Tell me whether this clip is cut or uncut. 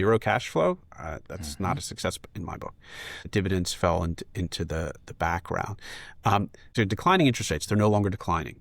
cut